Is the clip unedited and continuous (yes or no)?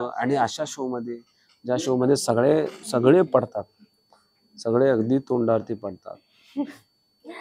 yes